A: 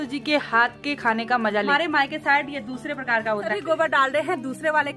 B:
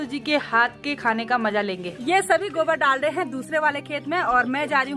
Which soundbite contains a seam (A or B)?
A